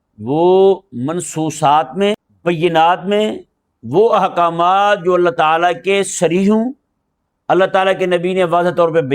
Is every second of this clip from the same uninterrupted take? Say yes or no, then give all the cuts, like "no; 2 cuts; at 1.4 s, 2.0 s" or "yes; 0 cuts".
no; 1 cut; at 2.3 s